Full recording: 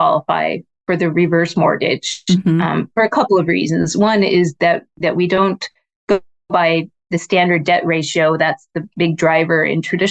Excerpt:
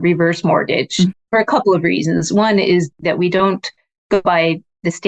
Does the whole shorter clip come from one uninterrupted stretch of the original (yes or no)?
no